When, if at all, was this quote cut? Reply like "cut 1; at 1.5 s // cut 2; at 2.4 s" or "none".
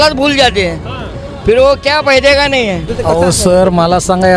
cut 1; at 2.9 s